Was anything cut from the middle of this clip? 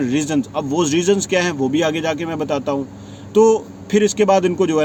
no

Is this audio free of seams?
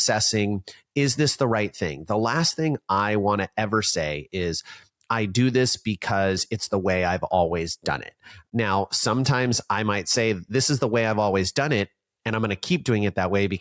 yes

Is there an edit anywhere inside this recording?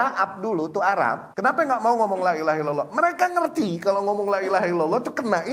yes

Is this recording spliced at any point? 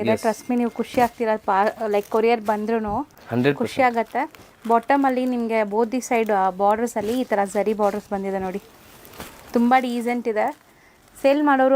no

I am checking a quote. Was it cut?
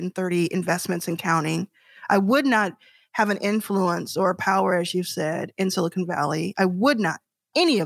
no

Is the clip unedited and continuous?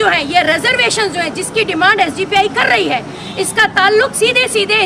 yes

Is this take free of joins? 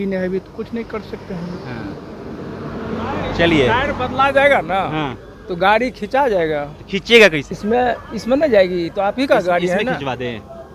yes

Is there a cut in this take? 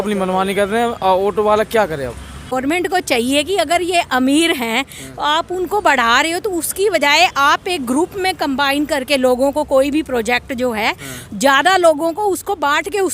yes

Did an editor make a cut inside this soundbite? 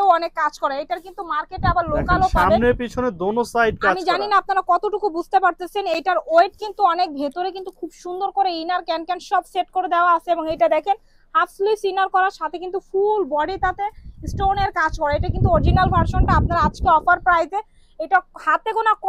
no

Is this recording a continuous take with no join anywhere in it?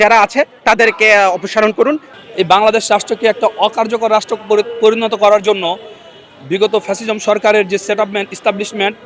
no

